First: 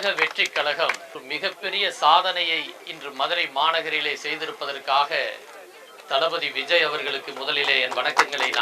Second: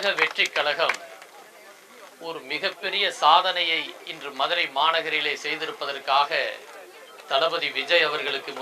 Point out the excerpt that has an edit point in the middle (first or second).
first